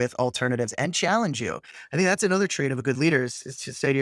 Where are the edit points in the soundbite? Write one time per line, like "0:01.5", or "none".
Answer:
none